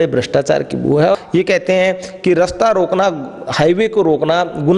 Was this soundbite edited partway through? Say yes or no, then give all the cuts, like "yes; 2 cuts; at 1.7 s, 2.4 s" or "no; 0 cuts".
yes; 1 cut; at 1.2 s